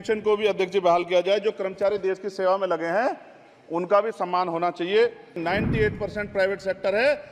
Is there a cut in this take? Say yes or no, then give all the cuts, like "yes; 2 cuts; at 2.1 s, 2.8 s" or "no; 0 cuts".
yes; 1 cut; at 5.4 s